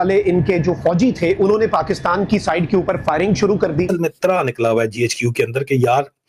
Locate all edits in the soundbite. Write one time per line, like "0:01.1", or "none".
0:03.9